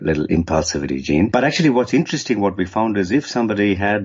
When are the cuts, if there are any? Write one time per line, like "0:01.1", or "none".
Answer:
0:01.3